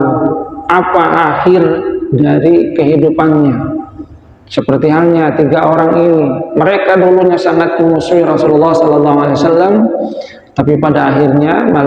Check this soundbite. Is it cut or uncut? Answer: uncut